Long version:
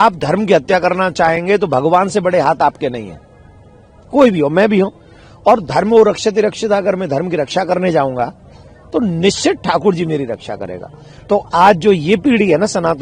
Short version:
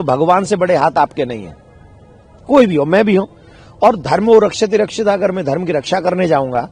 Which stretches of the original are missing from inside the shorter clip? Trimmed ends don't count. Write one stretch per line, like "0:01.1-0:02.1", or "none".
none

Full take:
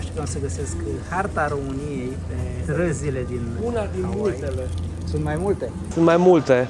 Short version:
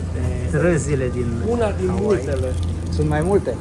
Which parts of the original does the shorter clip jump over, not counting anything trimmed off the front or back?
none

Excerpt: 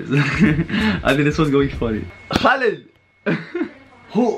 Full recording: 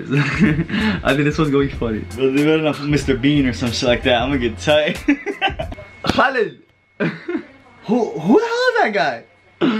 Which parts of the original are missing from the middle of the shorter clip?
0:02.1-0:05.8

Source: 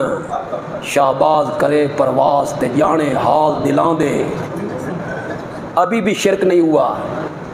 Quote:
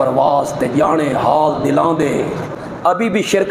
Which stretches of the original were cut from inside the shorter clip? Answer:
0:04.5-0:05.5

